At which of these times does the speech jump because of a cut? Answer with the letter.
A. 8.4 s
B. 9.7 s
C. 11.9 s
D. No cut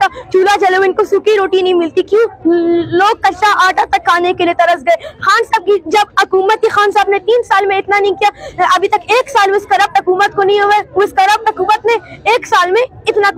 D